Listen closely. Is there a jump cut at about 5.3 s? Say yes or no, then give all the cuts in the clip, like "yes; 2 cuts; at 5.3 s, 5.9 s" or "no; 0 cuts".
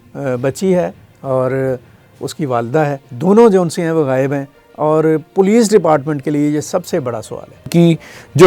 no; 3 cuts; at 1.1 s, 3.1 s, 7.7 s